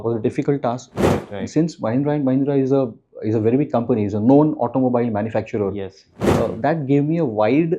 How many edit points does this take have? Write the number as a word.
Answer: two